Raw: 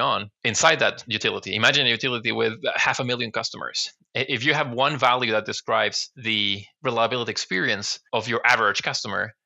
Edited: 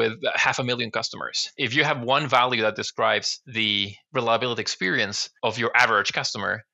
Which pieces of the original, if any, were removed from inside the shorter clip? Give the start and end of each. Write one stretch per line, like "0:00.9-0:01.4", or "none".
0:04.0-0:04.3